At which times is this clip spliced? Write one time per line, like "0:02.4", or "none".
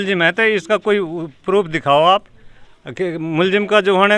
none